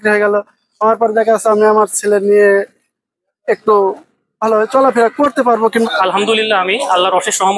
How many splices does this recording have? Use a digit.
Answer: 1